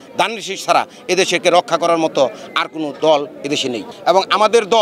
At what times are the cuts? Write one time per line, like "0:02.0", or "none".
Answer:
0:03.8